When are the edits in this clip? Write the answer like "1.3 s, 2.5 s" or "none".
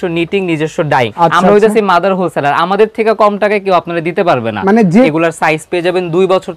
1.1 s, 5.1 s

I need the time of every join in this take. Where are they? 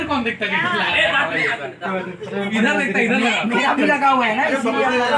none

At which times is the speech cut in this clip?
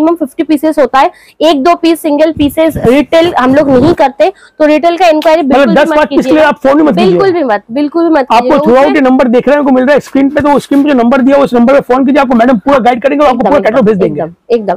none

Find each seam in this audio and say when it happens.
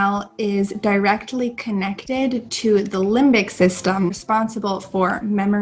4.2 s

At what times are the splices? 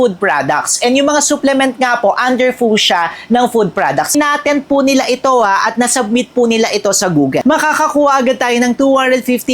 4.1 s, 7.4 s

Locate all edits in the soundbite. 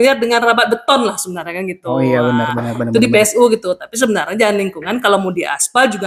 none

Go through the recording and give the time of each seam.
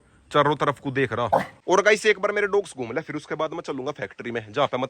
1.6 s

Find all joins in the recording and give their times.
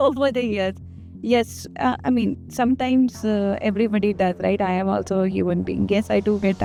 none

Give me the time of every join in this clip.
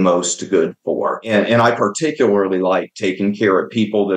1.2 s

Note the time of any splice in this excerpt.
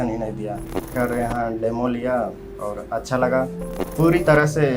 0.9 s, 3.8 s

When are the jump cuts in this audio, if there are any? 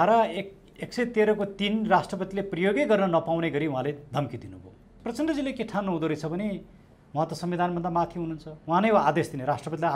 5.0 s

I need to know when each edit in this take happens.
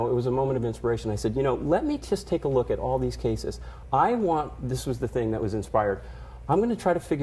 2.7 s

